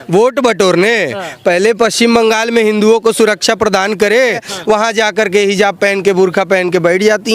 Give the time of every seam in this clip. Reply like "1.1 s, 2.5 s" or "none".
4.5 s